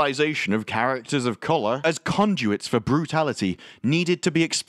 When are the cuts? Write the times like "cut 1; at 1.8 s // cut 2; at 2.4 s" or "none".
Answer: cut 1; at 1.8 s

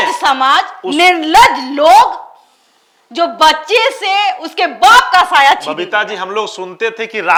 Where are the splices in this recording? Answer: none

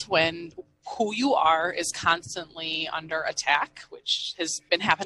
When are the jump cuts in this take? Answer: none

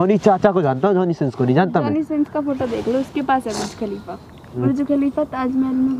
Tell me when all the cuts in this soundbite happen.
cut 1; at 4.6 s

